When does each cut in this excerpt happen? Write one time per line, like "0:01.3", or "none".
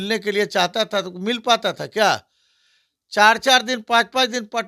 none